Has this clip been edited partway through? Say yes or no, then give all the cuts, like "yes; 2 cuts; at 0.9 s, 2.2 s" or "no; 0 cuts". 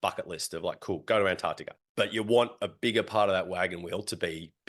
yes; 1 cut; at 1.7 s